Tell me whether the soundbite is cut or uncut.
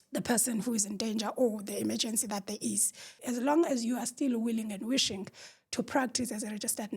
cut